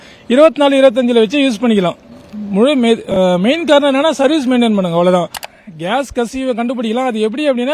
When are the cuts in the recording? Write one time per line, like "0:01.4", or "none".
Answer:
0:05.4